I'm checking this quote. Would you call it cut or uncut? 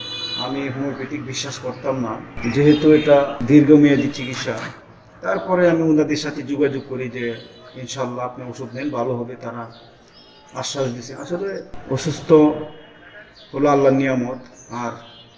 uncut